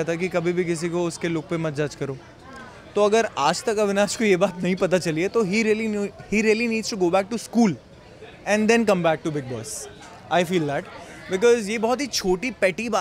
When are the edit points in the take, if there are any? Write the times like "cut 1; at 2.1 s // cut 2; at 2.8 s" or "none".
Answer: none